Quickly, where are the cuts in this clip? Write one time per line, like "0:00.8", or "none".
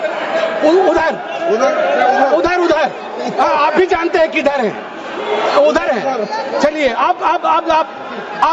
none